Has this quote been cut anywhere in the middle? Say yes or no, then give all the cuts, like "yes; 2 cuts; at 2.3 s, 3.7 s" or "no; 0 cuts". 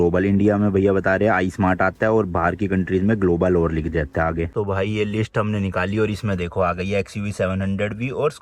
no; 0 cuts